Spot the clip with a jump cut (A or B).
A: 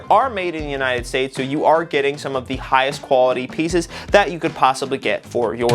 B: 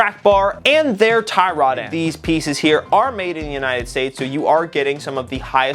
B